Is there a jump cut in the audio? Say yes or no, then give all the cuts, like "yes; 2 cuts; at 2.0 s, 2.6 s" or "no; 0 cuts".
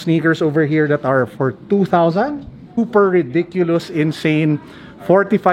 yes; 1 cut; at 2.8 s